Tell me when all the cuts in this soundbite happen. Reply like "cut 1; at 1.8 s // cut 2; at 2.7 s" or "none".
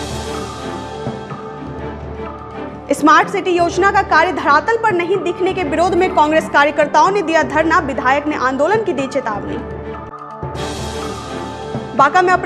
cut 1; at 1.0 s